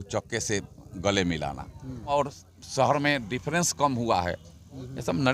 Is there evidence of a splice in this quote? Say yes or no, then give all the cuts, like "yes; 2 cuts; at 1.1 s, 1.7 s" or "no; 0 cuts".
yes; 1 cut; at 2.2 s